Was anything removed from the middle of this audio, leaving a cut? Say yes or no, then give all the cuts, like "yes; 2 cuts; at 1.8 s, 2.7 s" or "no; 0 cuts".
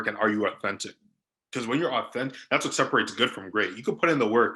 no; 0 cuts